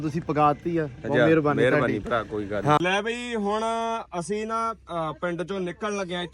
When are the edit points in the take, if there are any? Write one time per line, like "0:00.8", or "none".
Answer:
none

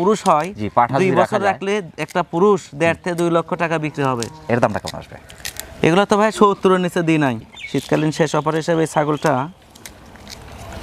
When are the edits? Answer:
none

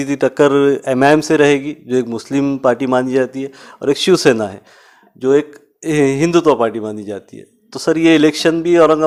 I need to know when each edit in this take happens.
none

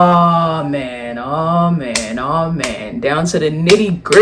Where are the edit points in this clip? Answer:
none

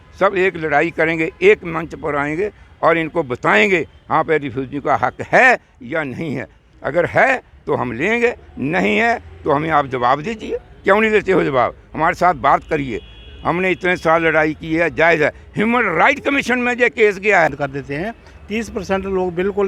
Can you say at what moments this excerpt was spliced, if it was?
0:17.5

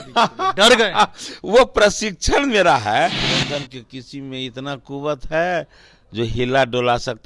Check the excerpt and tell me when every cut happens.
0:03.2

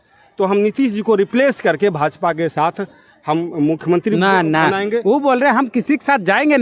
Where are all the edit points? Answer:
none

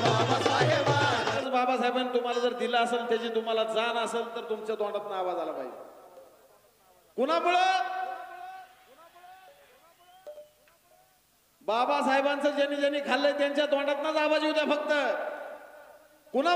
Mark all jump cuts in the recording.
0:01.4

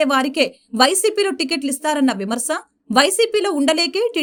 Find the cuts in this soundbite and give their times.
none

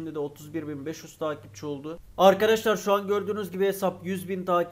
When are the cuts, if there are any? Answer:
0:02.0

